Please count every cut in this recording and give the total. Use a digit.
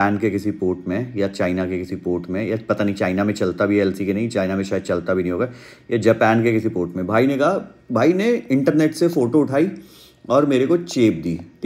0